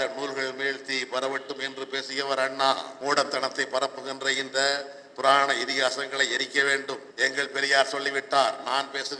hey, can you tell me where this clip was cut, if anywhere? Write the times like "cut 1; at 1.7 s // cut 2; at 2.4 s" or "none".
cut 1; at 2.9 s // cut 2; at 7.1 s